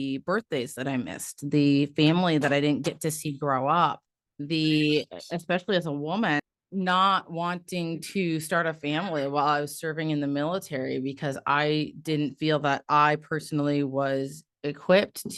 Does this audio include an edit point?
no; 0 cuts

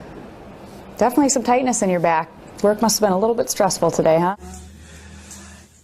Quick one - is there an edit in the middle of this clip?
yes; 1 cut; at 4.4 s

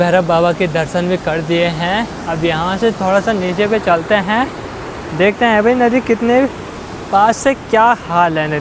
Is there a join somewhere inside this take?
no; 0 cuts

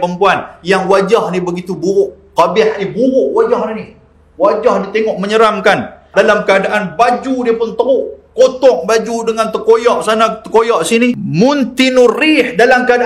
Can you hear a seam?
yes; 2 cuts; at 6.1 s, 11.2 s

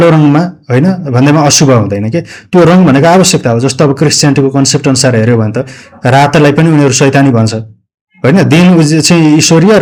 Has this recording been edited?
no; 0 cuts

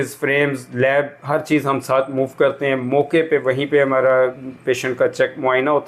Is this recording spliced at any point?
no; 0 cuts

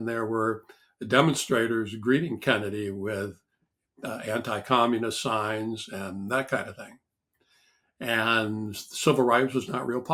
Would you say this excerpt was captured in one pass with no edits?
yes; 0 cuts

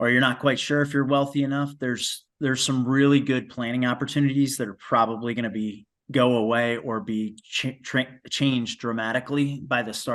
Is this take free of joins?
yes; 0 cuts

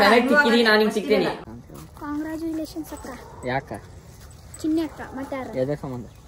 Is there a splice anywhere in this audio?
yes; 1 cut; at 1.4 s

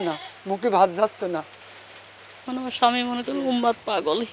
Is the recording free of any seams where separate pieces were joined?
no; 1 cut; at 2.3 s

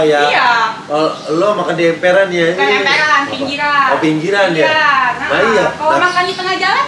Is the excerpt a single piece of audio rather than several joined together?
yes; 0 cuts

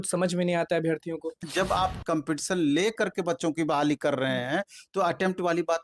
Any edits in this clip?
yes; 1 cut; at 1.5 s

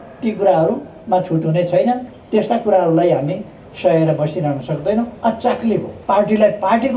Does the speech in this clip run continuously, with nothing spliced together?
no; 2 cuts; at 2.1 s, 5.9 s

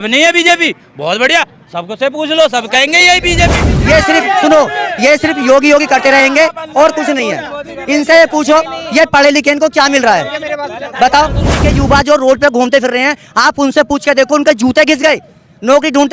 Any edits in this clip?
yes; 2 cuts; at 3.6 s, 11.7 s

